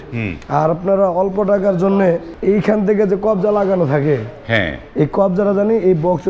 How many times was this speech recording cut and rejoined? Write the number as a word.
one